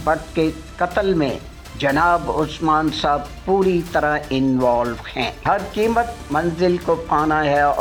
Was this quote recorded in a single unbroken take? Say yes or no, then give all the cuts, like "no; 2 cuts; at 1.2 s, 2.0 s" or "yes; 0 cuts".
yes; 0 cuts